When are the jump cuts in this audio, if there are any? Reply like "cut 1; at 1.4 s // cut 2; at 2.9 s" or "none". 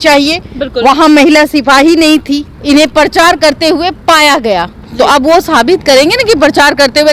cut 1; at 2.5 s